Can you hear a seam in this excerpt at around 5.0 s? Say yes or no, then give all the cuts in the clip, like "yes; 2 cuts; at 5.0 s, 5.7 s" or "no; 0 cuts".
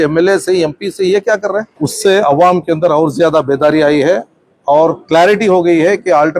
no; 1 cut; at 1.7 s